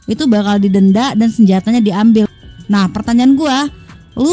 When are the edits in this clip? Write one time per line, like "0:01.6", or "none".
0:02.3